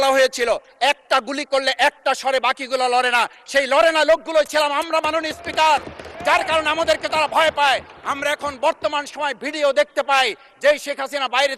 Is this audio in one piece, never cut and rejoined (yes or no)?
yes